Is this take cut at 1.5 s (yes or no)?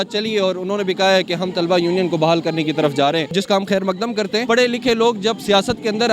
no